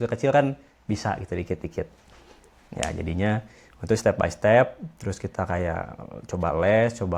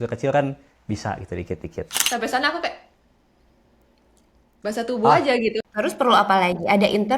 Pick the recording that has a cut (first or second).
second